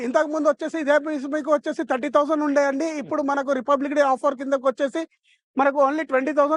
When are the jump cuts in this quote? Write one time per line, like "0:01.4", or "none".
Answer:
none